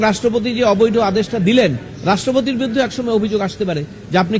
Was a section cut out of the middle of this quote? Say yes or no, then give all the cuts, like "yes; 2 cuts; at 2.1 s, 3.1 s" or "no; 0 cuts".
no; 0 cuts